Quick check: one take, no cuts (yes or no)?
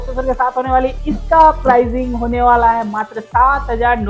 yes